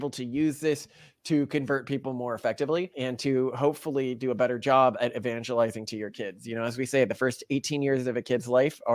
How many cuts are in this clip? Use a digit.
1